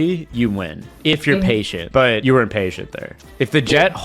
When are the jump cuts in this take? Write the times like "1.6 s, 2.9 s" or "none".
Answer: 2.0 s